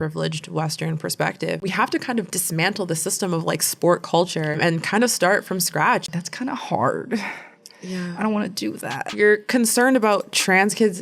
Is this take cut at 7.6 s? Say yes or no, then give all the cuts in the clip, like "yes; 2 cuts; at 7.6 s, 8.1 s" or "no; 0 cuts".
no; 3 cuts; at 1.6 s, 6.1 s, 9.0 s